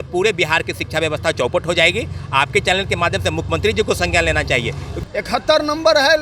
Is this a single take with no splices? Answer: no; 1 cut; at 4.9 s

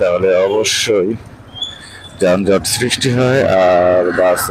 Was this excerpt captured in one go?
yes; 0 cuts

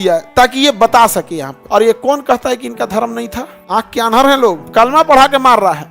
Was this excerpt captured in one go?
no; 3 cuts; at 1.6 s, 3.5 s, 4.6 s

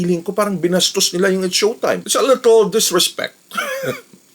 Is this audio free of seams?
no; 1 cut; at 2.0 s

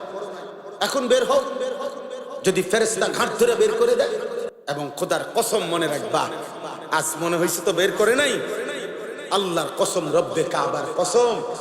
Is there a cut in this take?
yes; 1 cut; at 4.5 s

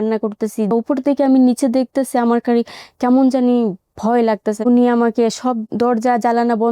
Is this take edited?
yes; 3 cuts; at 0.7 s, 4.6 s, 5.7 s

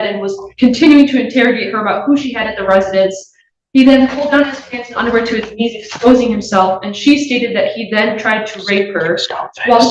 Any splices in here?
no; 0 cuts

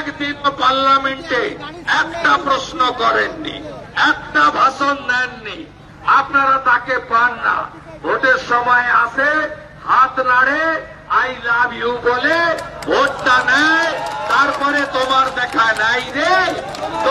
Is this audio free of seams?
yes; 0 cuts

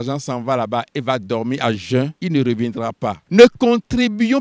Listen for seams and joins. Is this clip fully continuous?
no; 2 cuts; at 2.2 s, 3.2 s

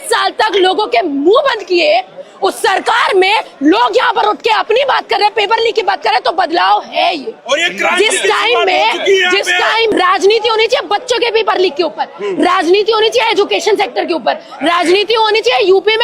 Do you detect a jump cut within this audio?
yes; 1 cut; at 9.9 s

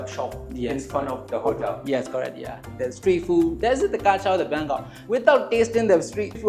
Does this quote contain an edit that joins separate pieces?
yes; 2 cuts; at 2.6 s, 4.9 s

